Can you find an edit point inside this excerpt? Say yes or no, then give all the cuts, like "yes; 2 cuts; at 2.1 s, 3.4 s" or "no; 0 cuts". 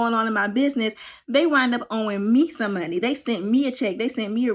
no; 0 cuts